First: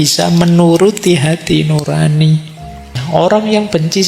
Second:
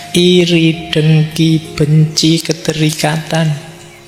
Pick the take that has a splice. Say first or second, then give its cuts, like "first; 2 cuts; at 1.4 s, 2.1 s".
first; 1 cut; at 2.9 s